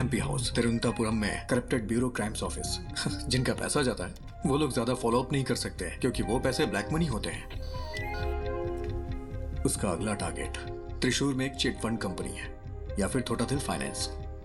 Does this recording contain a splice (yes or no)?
no